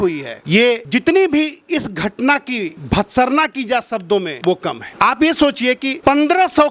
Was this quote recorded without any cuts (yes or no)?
yes